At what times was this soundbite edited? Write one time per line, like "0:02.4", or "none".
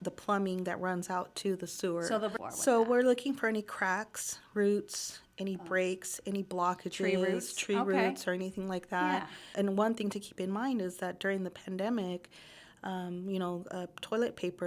0:02.4
0:09.4

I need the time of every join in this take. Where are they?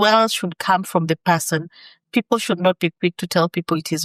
none

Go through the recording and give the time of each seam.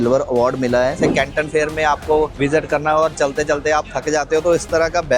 0:01.0
0:02.3

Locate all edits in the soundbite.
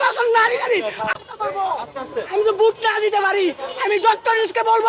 0:01.4

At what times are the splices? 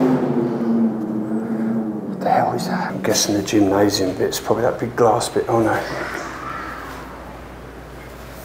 0:02.9

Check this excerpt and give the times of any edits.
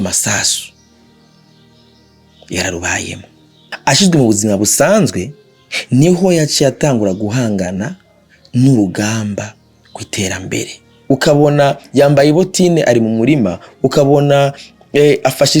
0:03.7
0:10.9

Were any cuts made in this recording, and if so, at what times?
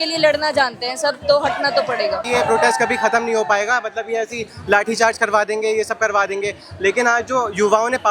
0:02.3

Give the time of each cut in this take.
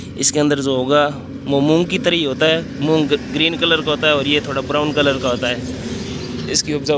none

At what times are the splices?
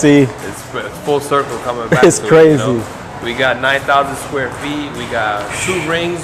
none

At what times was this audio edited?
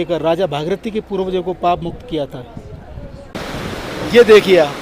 0:03.3

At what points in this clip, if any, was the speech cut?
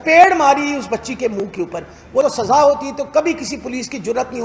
0:02.2

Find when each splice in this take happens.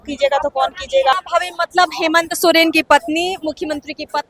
0:01.1

